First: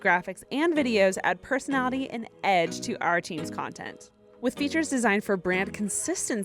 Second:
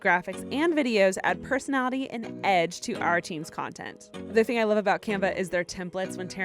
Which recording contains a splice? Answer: second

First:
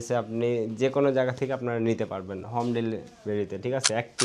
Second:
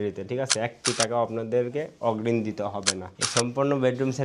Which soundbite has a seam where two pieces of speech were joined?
second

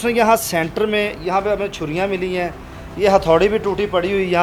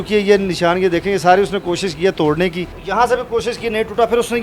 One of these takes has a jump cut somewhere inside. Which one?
second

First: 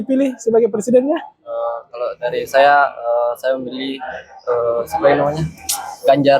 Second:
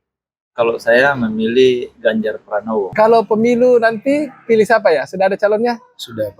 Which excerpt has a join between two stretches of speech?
second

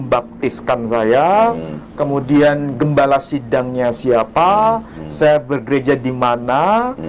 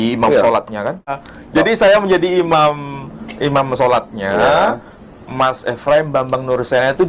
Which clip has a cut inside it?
second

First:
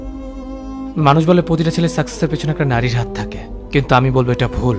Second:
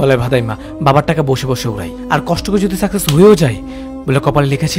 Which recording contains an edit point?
first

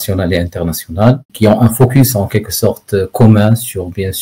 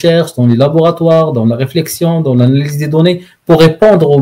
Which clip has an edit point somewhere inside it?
first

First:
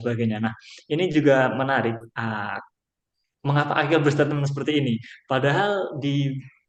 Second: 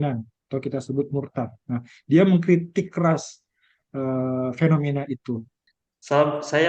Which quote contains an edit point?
second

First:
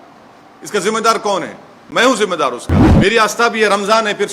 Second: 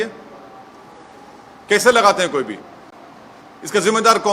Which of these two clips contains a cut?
first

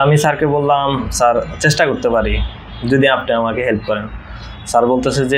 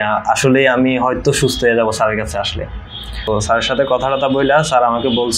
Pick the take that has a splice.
second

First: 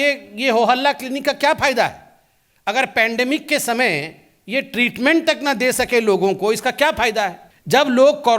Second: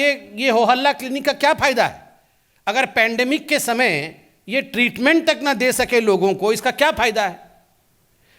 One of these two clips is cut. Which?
first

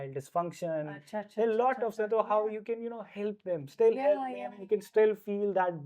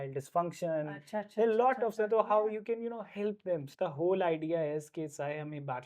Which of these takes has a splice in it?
second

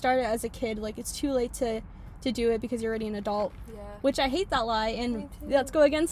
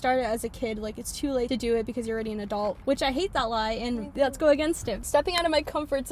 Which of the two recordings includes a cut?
second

